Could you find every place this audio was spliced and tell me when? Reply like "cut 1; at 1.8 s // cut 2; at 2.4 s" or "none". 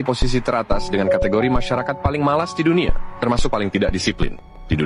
none

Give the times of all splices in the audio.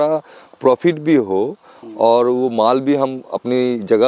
none

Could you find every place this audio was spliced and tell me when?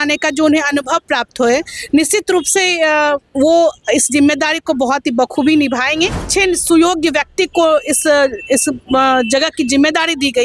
cut 1; at 6.2 s

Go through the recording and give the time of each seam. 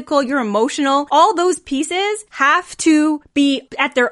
cut 1; at 1.1 s // cut 2; at 2.3 s

